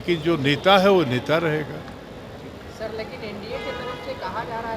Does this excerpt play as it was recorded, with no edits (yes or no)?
yes